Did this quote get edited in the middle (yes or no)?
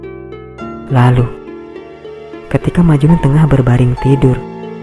yes